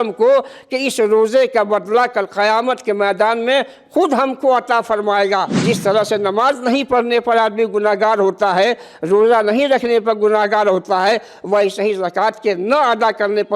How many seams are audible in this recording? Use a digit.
1